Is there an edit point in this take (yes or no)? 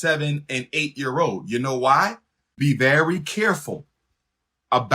yes